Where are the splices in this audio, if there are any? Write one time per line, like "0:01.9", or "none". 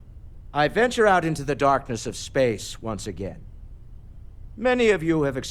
none

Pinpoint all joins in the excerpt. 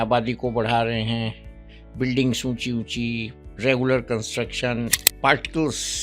0:05.0

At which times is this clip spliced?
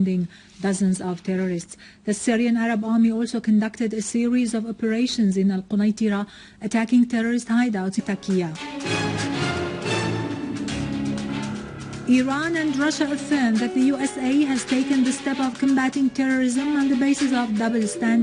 none

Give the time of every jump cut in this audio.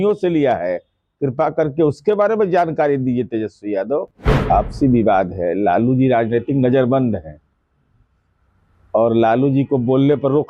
0:04.1

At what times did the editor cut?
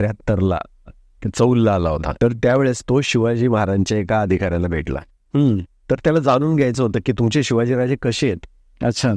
0:02.1
0:07.1

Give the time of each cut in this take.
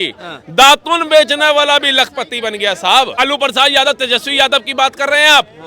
0:03.2

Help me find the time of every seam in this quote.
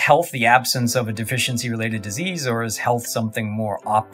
none

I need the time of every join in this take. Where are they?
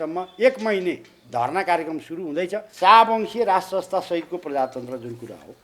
0:02.7

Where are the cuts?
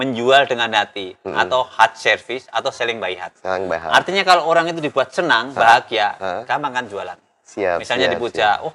none

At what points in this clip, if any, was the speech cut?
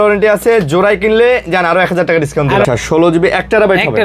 0:02.6

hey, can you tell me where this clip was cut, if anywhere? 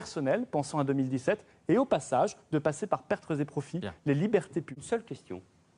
0:01.9

